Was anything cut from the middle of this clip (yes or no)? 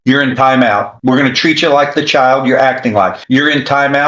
yes